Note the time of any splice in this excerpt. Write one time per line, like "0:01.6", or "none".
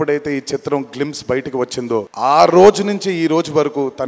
0:02.1